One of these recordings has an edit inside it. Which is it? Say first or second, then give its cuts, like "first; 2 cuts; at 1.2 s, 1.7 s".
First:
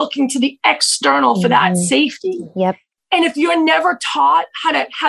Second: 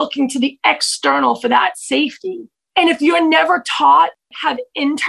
second; 2 cuts; at 2.5 s, 4.2 s